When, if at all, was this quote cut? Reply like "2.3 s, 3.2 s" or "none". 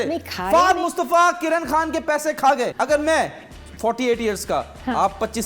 2.7 s